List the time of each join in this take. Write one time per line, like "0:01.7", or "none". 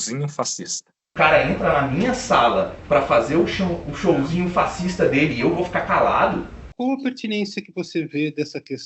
0:01.0
0:06.7